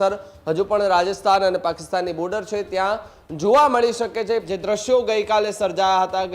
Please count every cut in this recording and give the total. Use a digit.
1